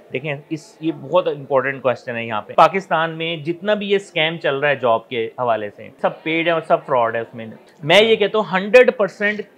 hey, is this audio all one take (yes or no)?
no